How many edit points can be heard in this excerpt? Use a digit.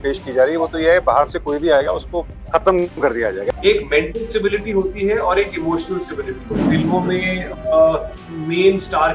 3